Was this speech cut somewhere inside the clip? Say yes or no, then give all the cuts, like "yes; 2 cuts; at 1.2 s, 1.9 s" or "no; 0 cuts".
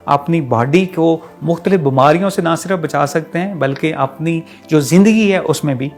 no; 0 cuts